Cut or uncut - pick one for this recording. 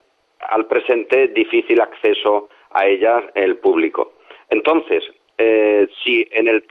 uncut